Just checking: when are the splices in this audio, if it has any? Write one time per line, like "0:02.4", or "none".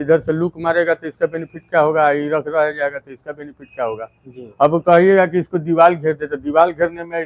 none